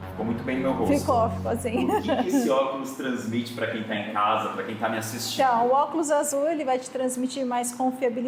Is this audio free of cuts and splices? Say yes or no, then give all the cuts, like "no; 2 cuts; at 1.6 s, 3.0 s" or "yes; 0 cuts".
yes; 0 cuts